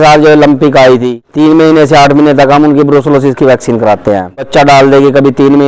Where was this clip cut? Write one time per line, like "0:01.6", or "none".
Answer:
0:01.2
0:04.5